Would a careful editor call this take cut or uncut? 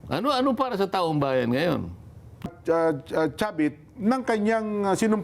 cut